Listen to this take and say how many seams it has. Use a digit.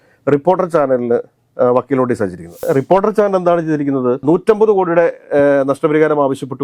2